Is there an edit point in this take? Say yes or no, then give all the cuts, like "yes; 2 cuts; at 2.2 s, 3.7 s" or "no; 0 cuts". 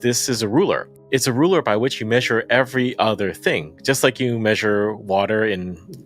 yes; 1 cut; at 0.9 s